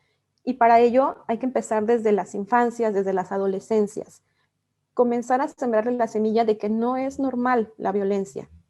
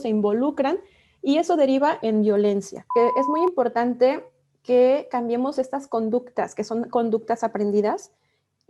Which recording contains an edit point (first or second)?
second